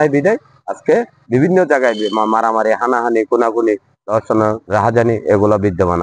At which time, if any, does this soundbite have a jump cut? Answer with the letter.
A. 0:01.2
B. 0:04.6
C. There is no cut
B